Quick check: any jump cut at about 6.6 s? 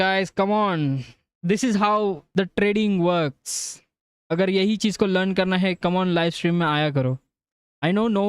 no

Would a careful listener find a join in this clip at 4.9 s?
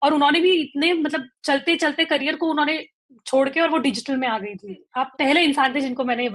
yes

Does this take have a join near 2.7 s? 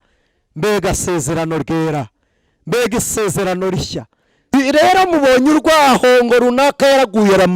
no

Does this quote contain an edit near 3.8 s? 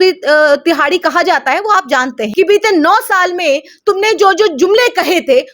no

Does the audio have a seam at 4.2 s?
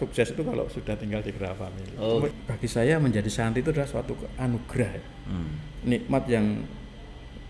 no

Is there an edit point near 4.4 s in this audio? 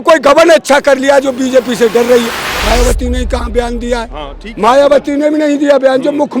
no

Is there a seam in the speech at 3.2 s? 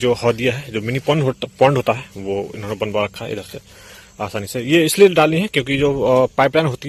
no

